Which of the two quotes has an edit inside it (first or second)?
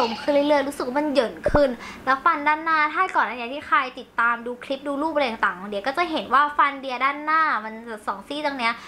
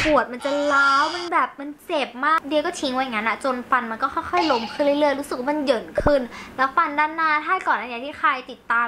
second